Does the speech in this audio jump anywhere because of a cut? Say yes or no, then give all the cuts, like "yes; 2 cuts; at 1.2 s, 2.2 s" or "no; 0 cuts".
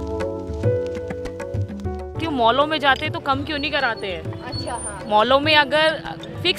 yes; 1 cut; at 2.2 s